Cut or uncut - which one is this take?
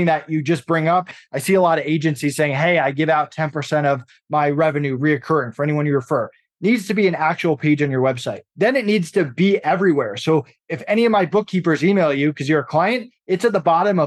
uncut